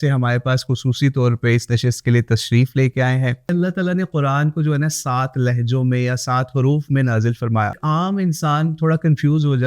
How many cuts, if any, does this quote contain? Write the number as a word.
two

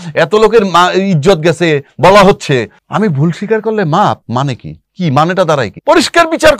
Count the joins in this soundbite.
three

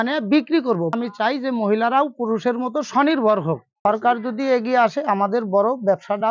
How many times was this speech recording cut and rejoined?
two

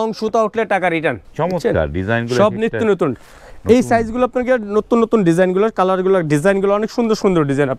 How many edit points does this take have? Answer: one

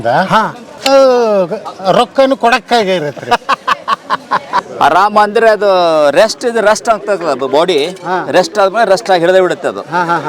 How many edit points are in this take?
one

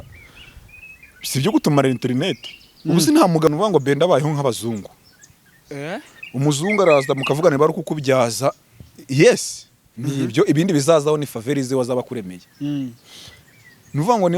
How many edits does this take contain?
one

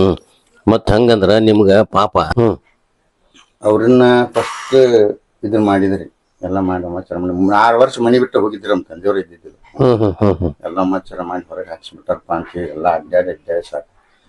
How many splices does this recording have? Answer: one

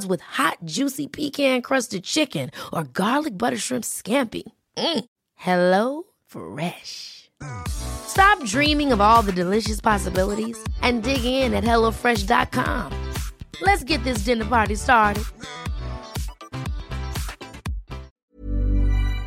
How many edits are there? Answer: one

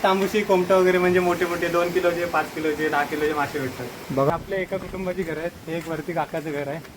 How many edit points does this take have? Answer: one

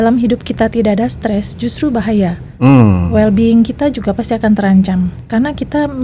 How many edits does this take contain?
zero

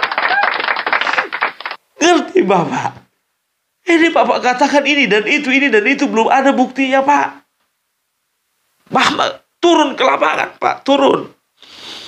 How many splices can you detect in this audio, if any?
one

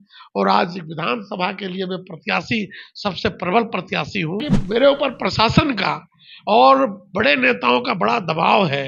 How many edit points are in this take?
one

